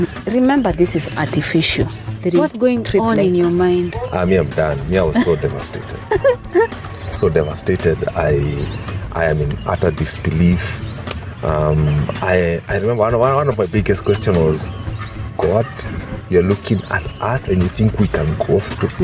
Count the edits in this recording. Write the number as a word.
one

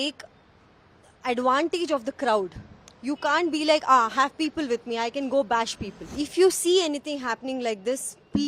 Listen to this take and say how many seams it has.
one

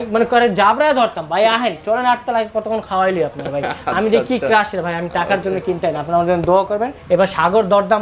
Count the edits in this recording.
one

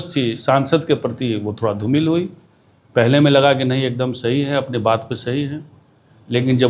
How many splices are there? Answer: zero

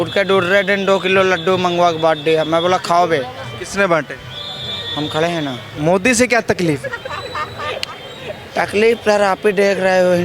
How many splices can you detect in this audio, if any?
one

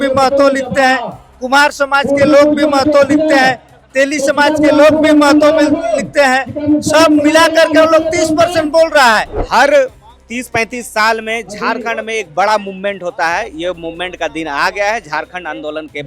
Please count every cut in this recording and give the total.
one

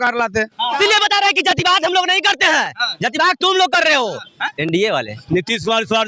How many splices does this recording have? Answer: three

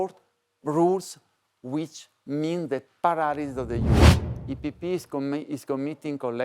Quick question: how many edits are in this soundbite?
one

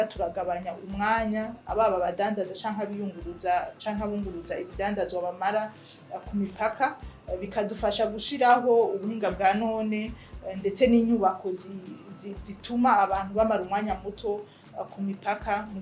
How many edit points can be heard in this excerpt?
zero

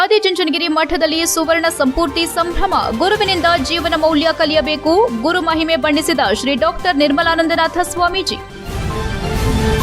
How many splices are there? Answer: one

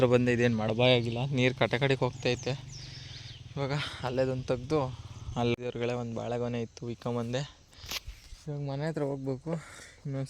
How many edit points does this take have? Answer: one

